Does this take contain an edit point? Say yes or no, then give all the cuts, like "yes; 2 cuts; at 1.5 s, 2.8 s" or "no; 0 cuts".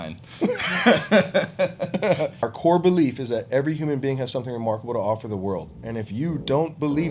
yes; 1 cut; at 2.4 s